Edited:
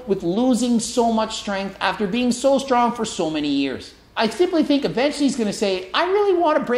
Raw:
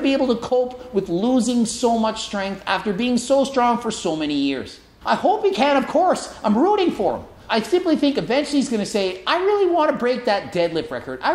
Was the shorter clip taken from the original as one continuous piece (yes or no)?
no